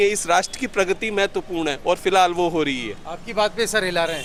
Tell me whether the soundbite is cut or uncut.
uncut